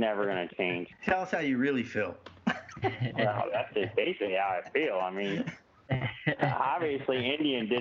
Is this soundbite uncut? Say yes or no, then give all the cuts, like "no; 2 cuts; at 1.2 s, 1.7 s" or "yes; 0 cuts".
no; 1 cut; at 0.9 s